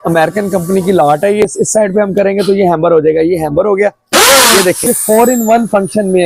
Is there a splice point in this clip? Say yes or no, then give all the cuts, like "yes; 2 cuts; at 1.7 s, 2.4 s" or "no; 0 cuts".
yes; 2 cuts; at 1.4 s, 4.8 s